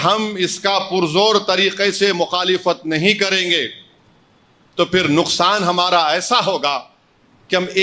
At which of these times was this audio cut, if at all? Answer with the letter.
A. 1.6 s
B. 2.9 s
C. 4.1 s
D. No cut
D